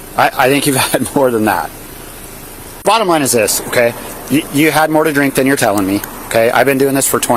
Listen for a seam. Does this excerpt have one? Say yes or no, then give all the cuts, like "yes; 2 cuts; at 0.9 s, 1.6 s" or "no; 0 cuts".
yes; 1 cut; at 2.7 s